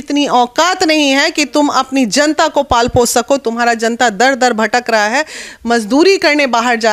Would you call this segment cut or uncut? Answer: uncut